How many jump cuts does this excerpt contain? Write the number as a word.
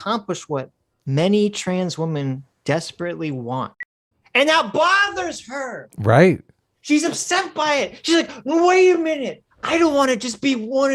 one